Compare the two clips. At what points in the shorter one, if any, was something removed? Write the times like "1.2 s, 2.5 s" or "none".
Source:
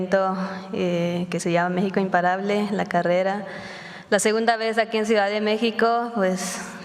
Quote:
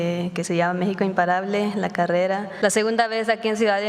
2.5 s